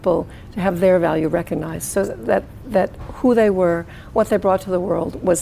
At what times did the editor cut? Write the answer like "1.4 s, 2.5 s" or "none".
none